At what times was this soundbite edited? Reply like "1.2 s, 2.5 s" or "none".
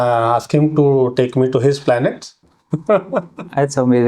2.3 s